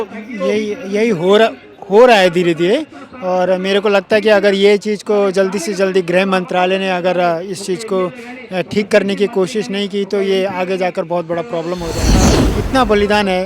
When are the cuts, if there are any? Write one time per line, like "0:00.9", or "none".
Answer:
0:12.1